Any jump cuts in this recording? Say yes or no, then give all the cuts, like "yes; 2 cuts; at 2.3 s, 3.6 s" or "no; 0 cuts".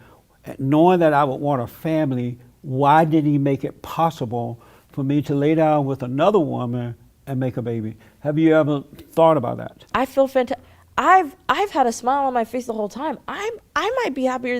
yes; 1 cut; at 9.9 s